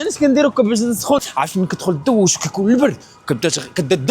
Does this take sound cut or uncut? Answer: cut